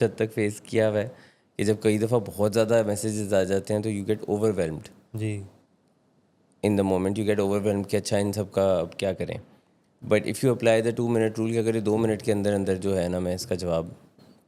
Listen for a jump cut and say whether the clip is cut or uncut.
uncut